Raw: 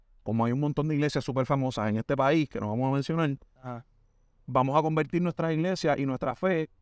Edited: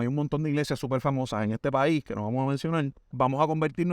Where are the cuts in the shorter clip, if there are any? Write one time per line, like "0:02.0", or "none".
0:03.0